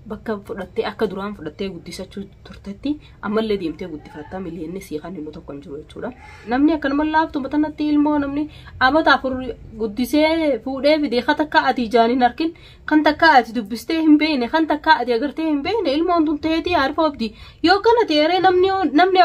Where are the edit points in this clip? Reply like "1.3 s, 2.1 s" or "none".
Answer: 6.4 s